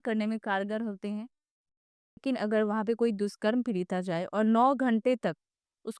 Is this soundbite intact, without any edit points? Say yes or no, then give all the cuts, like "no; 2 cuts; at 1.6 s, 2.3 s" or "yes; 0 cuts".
no; 1 cut; at 1.7 s